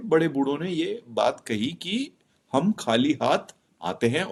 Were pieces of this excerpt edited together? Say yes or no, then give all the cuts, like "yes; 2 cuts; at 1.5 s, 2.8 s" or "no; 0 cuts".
no; 0 cuts